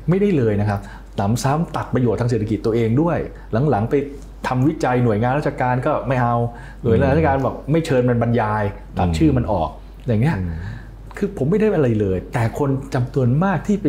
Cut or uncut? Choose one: uncut